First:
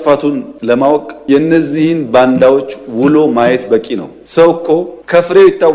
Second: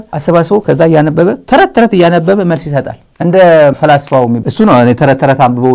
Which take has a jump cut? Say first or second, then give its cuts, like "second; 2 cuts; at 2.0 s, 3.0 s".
second; 2 cuts; at 3.0 s, 4.4 s